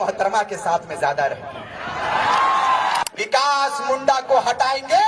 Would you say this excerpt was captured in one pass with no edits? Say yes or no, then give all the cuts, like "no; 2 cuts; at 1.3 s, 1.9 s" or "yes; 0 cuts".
no; 1 cut; at 3.0 s